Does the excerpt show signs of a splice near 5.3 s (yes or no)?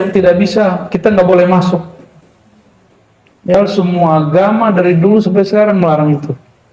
no